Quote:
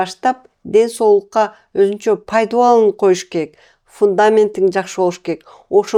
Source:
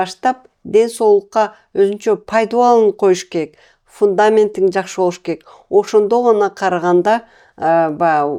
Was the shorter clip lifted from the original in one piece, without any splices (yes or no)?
yes